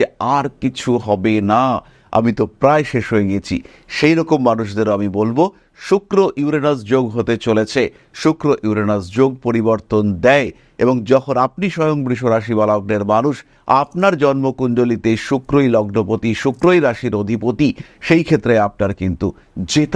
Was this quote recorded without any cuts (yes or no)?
yes